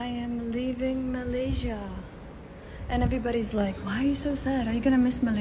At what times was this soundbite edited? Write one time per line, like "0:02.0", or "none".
none